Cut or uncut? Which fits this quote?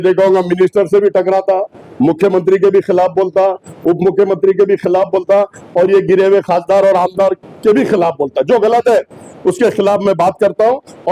uncut